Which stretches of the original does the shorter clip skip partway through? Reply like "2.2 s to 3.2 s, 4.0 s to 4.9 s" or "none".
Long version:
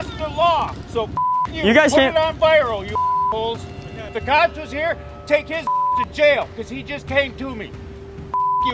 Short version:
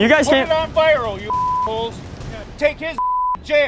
4.1 s to 5.1 s